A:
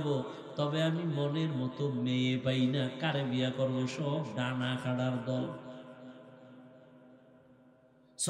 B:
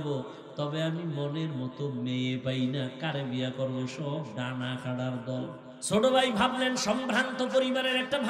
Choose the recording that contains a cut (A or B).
B